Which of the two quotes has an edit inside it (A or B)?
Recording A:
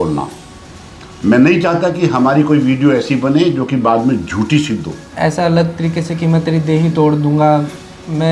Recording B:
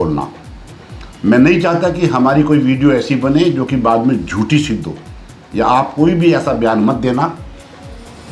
A